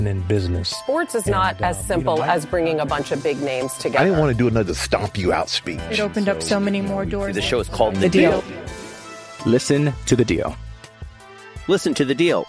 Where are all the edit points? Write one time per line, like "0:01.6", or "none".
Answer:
none